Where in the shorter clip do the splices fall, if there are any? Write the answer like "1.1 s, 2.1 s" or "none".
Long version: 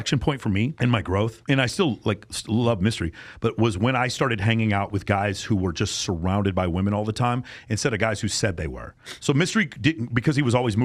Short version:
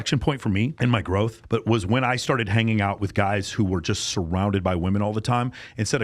1.4 s